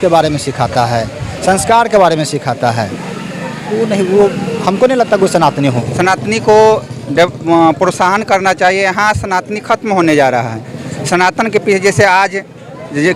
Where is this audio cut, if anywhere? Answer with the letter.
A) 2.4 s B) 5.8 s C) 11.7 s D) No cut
B